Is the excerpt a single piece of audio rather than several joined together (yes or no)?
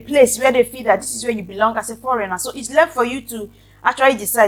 yes